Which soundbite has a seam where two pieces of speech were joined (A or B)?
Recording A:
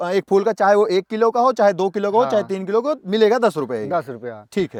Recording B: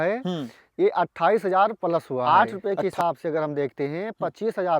B